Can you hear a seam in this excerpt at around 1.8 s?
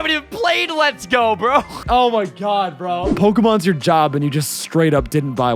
yes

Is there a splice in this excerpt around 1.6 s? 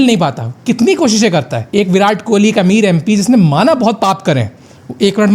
yes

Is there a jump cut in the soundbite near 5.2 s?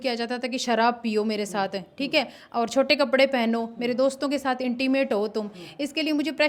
no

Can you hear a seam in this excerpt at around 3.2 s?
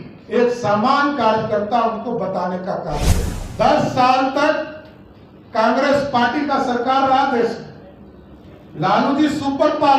yes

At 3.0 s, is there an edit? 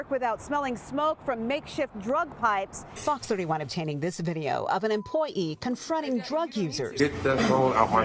yes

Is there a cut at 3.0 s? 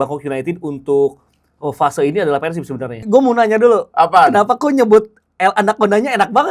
yes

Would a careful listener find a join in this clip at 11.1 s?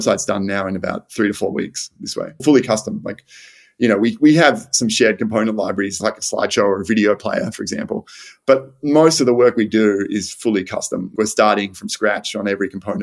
yes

